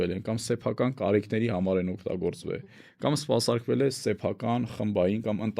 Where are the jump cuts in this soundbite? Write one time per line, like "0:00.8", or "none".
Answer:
none